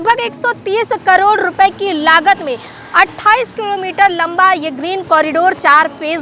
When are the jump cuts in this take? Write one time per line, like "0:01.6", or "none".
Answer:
none